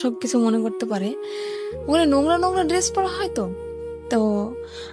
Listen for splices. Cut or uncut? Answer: uncut